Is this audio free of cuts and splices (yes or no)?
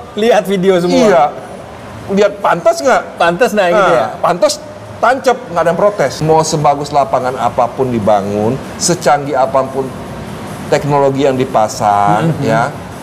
no